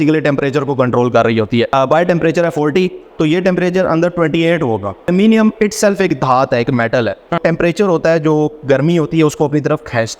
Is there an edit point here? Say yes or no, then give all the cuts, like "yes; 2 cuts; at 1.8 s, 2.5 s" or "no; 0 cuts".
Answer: yes; 3 cuts; at 1.7 s, 5.1 s, 7.4 s